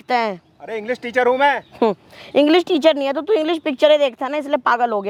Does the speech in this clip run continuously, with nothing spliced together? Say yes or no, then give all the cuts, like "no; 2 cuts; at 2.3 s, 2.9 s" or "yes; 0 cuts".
yes; 0 cuts